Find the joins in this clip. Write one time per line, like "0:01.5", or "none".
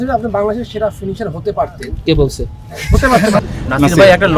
0:03.4